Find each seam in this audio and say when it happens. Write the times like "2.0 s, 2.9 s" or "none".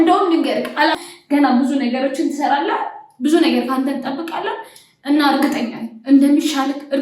0.9 s